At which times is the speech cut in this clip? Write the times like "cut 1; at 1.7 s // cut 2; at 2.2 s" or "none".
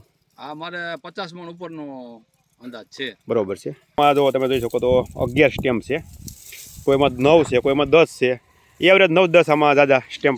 cut 1; at 4.0 s